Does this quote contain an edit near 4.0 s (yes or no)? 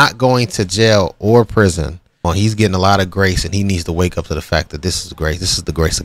no